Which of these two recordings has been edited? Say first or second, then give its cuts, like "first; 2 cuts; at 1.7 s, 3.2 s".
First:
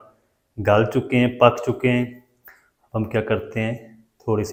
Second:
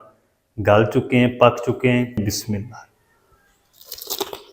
second; 1 cut; at 2.2 s